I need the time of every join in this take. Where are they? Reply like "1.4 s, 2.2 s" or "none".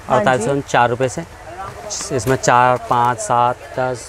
none